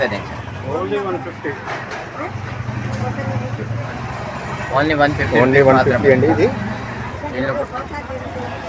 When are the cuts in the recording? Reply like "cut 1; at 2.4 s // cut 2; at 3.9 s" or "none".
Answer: cut 1; at 3.8 s